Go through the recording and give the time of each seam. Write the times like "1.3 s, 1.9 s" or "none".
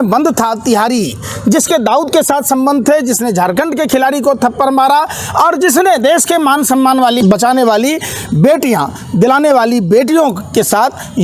7.2 s